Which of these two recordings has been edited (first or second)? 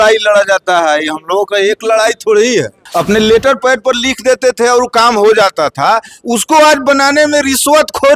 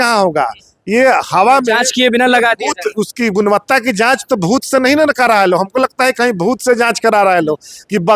first